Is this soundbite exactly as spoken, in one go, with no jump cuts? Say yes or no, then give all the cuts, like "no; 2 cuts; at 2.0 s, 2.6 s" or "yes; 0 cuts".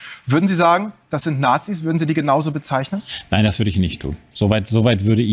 yes; 0 cuts